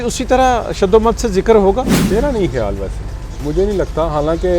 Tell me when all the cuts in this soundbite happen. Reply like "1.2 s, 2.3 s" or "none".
2.0 s